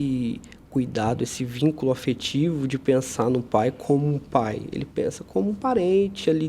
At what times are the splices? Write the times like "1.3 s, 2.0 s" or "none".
none